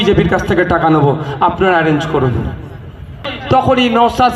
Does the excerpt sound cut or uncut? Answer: cut